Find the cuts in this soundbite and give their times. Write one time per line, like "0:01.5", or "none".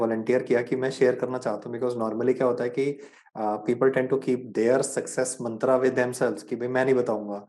none

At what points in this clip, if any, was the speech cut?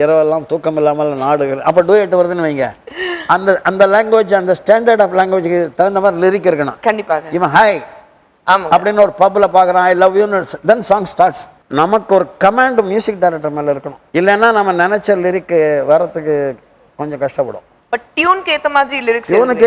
0:11.6
0:13.9

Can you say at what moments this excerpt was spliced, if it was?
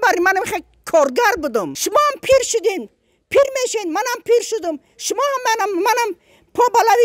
0:01.8

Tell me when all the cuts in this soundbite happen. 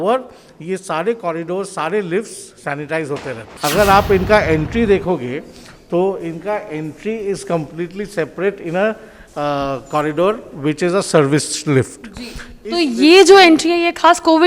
0:03.4

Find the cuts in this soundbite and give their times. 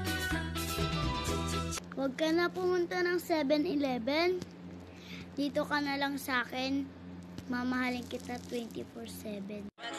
0:01.8

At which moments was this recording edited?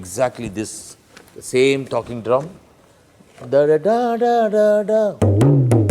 none

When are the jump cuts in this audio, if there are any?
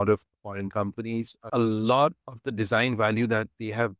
0:01.5

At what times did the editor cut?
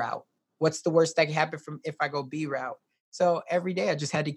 0:02.9

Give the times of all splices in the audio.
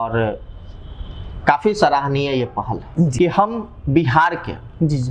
0:03.1

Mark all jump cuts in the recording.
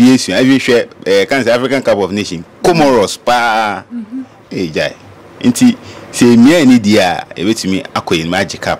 none

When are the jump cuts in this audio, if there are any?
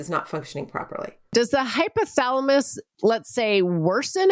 0:01.3

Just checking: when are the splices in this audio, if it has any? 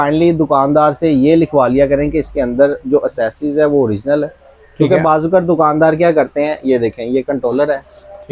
none

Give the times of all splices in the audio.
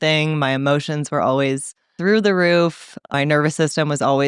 0:01.9
0:03.1

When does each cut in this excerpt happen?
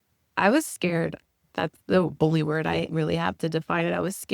0:01.5

